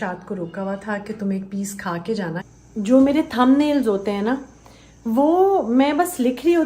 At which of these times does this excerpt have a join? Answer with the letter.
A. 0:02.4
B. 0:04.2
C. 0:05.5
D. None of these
A